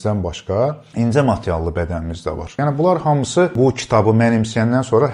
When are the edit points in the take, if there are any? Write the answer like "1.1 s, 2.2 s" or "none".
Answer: 0.8 s, 2.6 s, 3.5 s